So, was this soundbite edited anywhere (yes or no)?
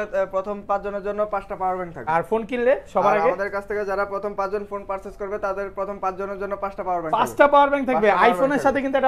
yes